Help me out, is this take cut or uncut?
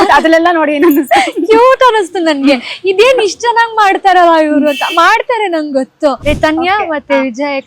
cut